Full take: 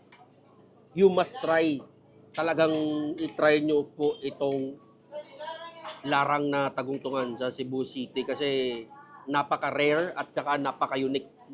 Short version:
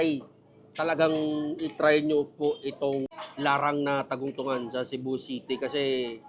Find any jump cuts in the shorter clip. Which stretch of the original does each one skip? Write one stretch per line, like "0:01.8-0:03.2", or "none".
0:04.8-0:05.9

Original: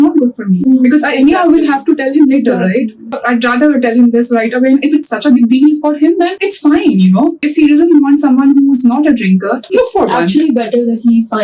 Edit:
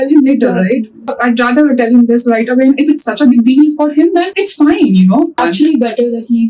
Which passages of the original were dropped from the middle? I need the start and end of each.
0:07.4-0:10.1

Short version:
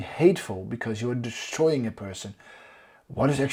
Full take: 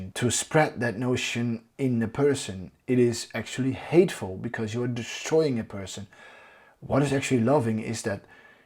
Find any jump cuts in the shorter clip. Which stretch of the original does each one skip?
none

